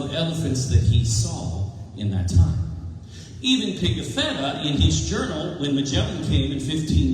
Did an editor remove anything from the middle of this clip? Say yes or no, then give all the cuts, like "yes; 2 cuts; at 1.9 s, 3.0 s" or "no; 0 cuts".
yes; 1 cut; at 2.6 s